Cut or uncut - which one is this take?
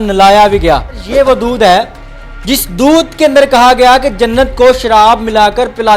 cut